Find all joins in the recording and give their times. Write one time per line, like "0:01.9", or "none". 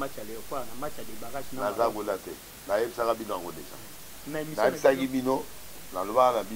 none